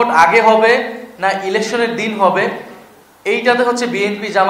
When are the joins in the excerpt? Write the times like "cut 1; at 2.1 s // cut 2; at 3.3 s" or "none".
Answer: none